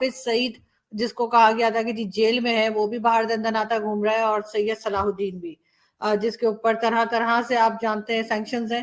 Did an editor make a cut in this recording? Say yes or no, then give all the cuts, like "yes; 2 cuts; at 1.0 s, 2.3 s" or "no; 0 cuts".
no; 0 cuts